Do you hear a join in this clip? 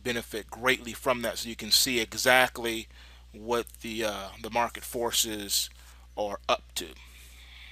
no; 0 cuts

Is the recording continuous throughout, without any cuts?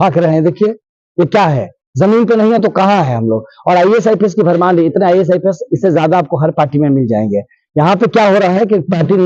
yes; 0 cuts

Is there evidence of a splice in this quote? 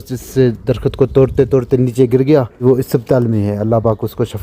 yes; 1 cut; at 2.6 s

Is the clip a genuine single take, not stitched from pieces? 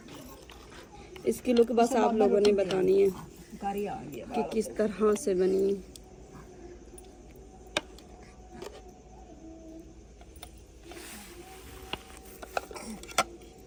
yes; 0 cuts

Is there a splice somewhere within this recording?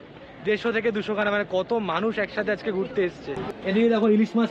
yes; 1 cut; at 3.4 s

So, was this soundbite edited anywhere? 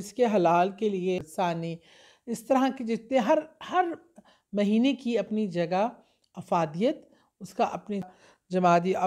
yes; 2 cuts; at 1.2 s, 8.1 s

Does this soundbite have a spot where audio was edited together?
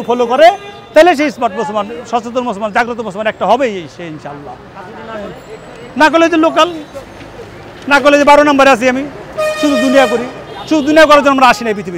no; 0 cuts

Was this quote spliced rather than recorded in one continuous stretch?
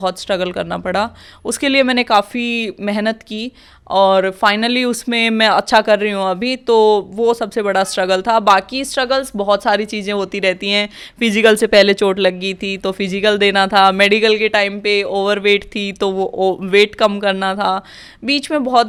no; 0 cuts

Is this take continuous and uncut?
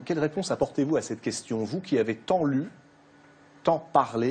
yes; 0 cuts

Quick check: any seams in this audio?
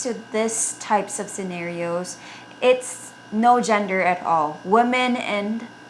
no; 0 cuts

